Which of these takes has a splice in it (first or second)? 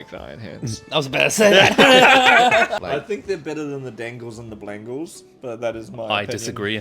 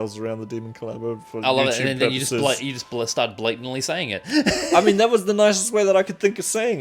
first